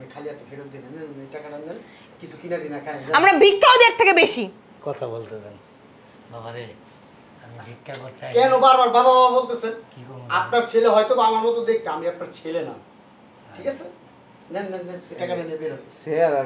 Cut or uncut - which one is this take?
uncut